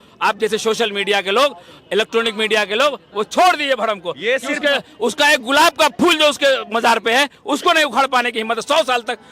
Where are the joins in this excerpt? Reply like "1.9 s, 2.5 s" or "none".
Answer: none